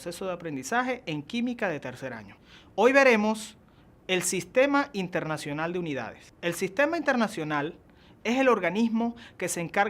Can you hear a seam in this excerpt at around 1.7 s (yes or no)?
yes